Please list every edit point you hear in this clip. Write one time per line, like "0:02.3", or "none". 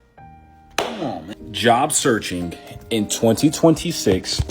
none